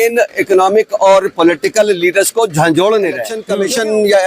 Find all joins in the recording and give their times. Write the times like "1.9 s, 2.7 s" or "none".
3.4 s